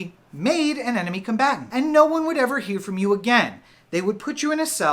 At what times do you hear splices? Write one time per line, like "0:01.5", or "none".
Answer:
0:01.6